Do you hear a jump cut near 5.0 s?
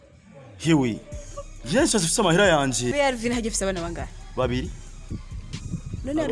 no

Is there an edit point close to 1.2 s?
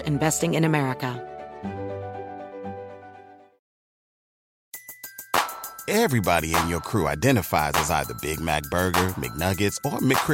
yes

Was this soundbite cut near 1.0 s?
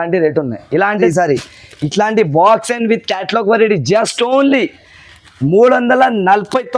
yes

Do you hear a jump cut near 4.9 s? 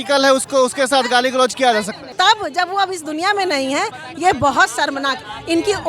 no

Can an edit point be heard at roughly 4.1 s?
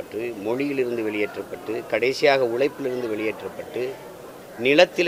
no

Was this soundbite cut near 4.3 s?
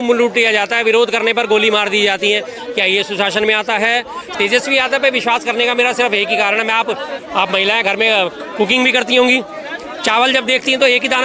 yes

